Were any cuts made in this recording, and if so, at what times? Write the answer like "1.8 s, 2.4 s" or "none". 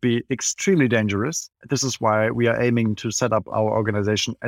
1.6 s